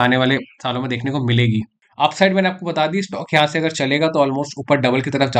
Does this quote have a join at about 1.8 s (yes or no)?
yes